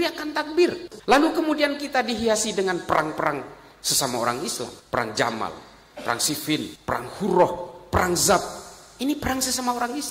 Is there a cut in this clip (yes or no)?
yes